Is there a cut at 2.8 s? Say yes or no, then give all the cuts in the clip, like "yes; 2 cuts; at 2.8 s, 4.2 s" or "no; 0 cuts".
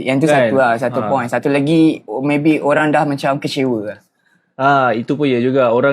yes; 1 cut; at 2.8 s